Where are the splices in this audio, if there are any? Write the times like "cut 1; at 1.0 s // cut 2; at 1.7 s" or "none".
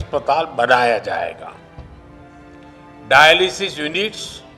none